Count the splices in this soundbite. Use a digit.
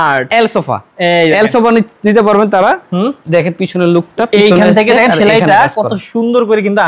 0